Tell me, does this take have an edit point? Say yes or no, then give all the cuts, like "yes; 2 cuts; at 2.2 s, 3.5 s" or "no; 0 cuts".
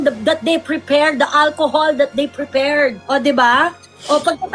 no; 0 cuts